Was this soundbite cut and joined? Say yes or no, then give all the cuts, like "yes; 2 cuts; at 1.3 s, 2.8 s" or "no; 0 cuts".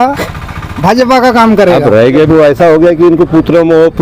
yes; 1 cut; at 2.3 s